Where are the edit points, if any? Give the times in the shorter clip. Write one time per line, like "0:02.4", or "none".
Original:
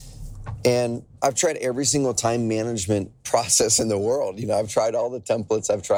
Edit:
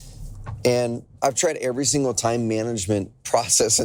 none